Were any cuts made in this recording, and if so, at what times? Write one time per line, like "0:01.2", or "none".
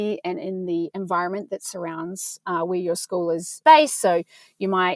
0:03.6